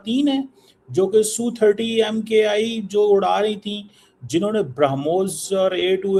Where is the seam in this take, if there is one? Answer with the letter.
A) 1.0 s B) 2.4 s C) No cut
C